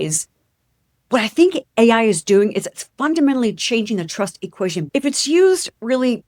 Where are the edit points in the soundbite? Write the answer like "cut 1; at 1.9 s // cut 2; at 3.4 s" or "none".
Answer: cut 1; at 4.8 s